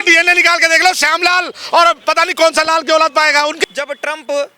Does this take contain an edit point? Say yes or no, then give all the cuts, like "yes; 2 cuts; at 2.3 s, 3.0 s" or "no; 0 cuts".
yes; 1 cut; at 3.7 s